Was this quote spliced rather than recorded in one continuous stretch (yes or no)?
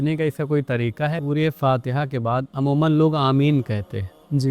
yes